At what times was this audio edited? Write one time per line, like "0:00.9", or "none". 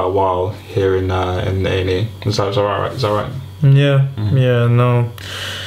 0:04.5